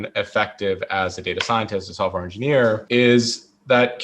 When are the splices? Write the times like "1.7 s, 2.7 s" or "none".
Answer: 2.8 s